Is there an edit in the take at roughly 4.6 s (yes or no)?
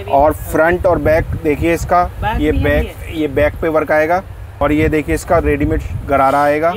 yes